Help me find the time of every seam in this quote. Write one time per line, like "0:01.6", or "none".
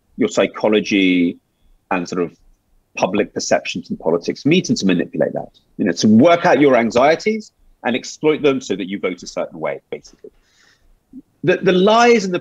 none